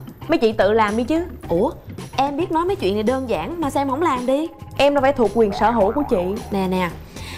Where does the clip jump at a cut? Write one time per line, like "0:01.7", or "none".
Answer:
none